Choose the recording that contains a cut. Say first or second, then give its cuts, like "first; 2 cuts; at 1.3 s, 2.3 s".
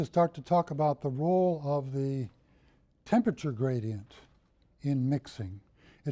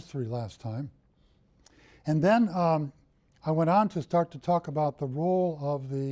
second; 1 cut; at 2.5 s